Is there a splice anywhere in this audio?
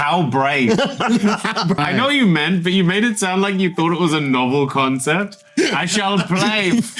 yes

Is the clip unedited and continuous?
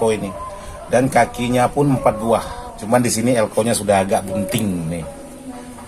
no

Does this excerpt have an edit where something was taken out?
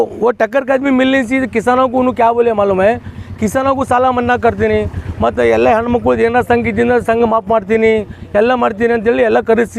no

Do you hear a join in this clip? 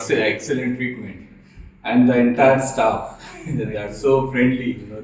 no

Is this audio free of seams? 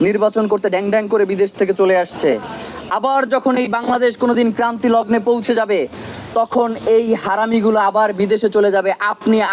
yes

